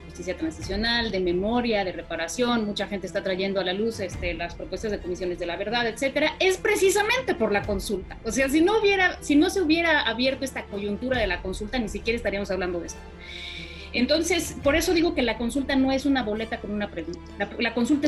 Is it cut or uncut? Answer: uncut